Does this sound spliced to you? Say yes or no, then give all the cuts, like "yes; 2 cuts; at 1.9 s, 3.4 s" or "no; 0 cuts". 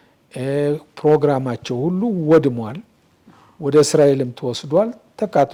no; 0 cuts